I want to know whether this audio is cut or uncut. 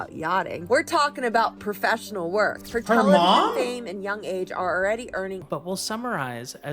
cut